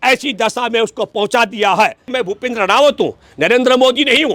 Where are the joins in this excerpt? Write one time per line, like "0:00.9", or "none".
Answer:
0:02.1